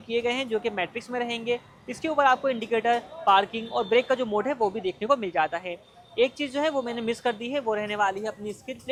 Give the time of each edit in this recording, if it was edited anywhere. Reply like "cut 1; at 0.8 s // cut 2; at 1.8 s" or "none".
none